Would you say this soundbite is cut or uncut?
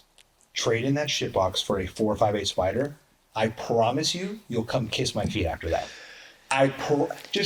uncut